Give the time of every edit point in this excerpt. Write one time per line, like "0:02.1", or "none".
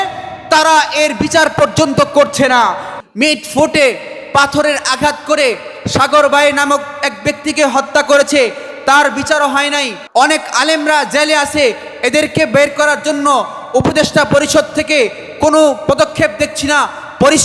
0:03.0
0:10.0